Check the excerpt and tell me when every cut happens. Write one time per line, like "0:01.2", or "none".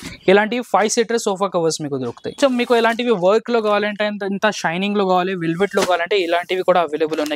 0:02.4